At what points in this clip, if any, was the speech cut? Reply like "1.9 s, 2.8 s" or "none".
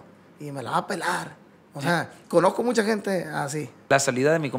2.2 s, 3.9 s